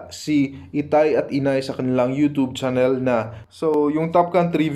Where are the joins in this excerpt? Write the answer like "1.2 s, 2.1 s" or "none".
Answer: 3.7 s